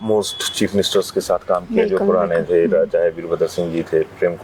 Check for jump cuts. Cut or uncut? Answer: uncut